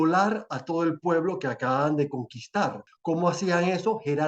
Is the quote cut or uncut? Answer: cut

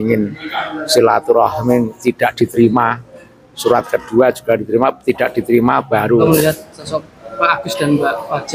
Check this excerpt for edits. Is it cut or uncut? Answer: cut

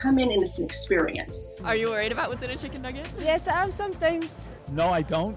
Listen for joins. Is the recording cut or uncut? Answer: cut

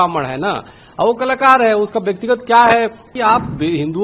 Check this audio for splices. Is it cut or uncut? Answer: cut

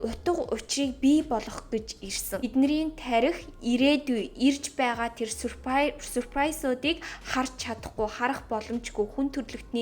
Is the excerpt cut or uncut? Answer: cut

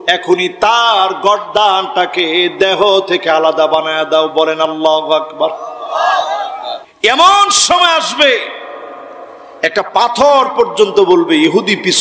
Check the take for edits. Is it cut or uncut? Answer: cut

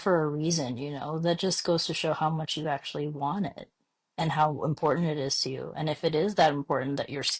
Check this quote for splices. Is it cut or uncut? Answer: uncut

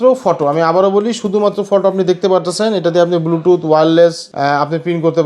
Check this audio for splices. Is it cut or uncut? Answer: cut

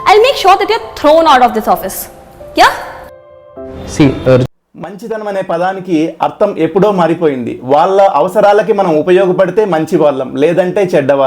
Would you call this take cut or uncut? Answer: cut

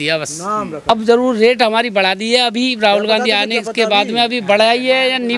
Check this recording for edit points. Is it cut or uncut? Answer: cut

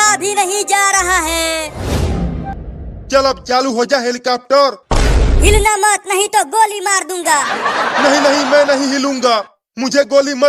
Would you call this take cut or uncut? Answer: cut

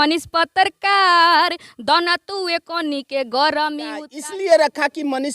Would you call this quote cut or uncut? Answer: cut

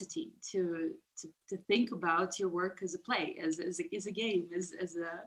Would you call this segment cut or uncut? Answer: uncut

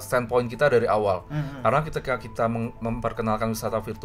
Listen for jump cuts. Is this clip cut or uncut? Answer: uncut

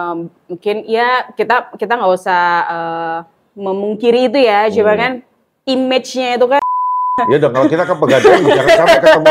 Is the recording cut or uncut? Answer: uncut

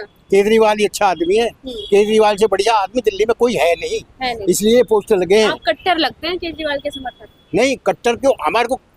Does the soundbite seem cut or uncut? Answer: uncut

